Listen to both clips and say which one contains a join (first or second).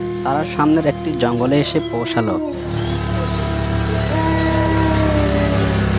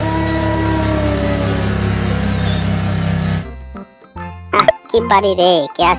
second